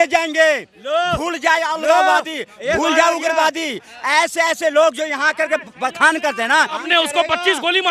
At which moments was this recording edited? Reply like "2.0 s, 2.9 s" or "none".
6.8 s